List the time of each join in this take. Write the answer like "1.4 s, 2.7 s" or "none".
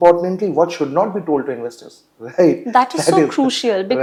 none